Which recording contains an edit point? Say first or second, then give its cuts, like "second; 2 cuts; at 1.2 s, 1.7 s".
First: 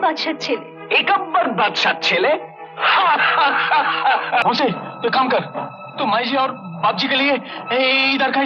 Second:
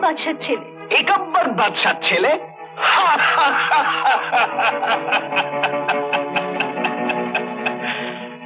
first; 1 cut; at 4.4 s